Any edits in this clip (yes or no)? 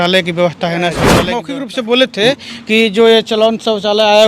yes